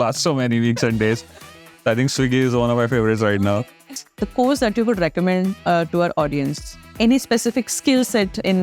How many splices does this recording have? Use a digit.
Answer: 2